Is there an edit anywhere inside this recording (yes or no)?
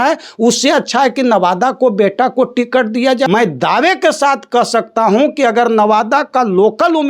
yes